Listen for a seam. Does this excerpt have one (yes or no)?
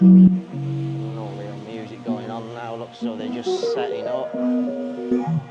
no